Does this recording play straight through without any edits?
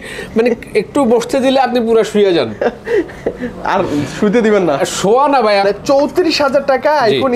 no; 1 cut; at 5.6 s

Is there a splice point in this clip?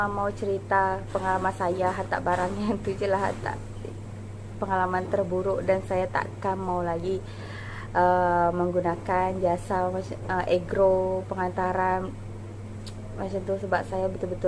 no; 0 cuts

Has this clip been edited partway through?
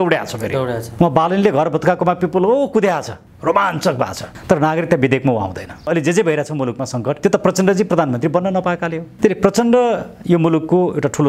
yes; 1 cut; at 5.9 s

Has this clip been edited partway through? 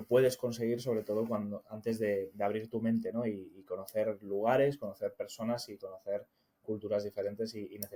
no; 0 cuts

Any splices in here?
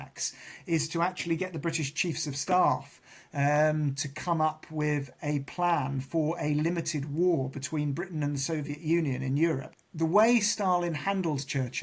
yes; 1 cut; at 9.8 s

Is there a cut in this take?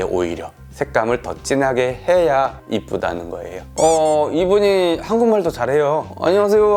no; 0 cuts

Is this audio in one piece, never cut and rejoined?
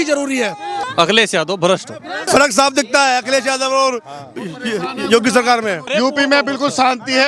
no; 3 cuts; at 0.8 s, 2.3 s, 5.9 s

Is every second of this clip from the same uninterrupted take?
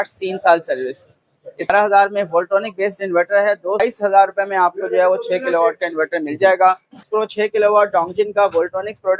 no; 3 cuts; at 1.7 s, 3.8 s, 7.1 s

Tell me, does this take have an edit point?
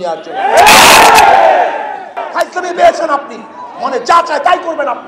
yes; 1 cut; at 2.2 s

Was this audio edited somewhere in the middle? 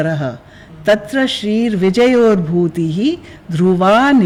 no; 0 cuts

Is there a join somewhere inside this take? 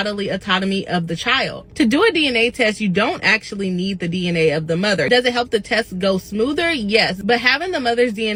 no; 0 cuts

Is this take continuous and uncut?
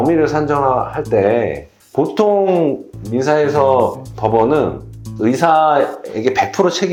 yes; 0 cuts

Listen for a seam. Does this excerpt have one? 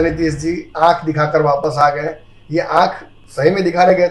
no; 0 cuts

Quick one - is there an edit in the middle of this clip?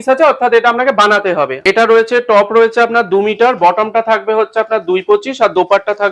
yes; 1 cut; at 1.5 s

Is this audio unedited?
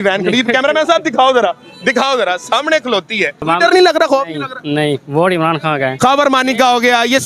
no; 2 cuts; at 3.5 s, 5.9 s

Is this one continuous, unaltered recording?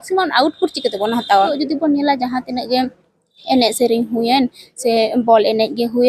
no; 1 cut; at 1.6 s

